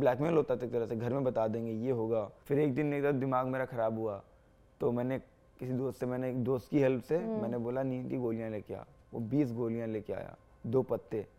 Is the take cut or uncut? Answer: cut